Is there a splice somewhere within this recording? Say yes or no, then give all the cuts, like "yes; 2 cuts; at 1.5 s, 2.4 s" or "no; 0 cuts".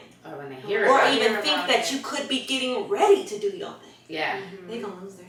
no; 0 cuts